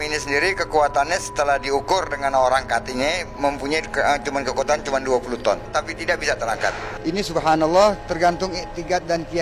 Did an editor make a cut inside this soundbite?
yes; 1 cut; at 6.9 s

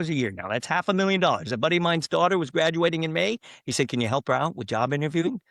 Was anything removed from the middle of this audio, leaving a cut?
no; 0 cuts

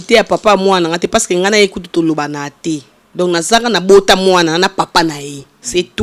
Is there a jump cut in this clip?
no; 0 cuts

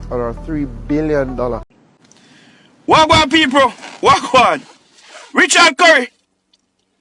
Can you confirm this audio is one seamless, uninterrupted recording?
no; 1 cut; at 1.7 s

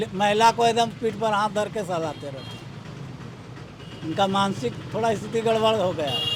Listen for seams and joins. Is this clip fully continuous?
yes; 0 cuts

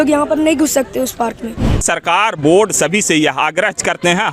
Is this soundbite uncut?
no; 1 cut; at 1.8 s

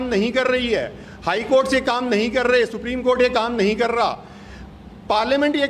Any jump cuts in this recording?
no; 0 cuts

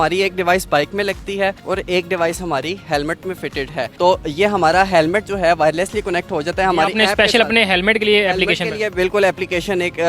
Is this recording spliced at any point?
no; 0 cuts

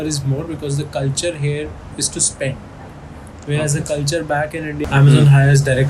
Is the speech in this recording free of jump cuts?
no; 1 cut; at 4.8 s

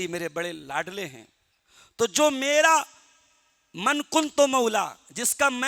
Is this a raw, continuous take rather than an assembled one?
yes; 0 cuts

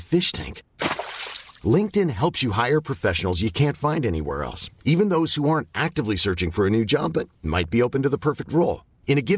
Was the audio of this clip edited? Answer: no; 0 cuts

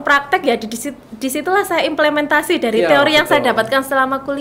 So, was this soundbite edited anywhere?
no; 0 cuts

